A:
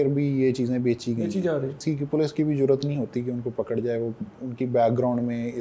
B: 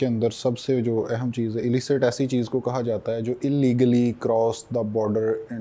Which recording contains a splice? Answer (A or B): A